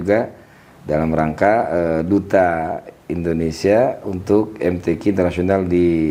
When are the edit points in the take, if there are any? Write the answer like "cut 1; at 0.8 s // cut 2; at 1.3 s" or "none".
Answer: none